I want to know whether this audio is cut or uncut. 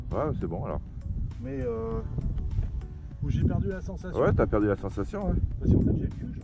uncut